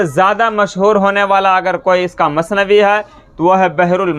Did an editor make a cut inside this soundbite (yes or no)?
no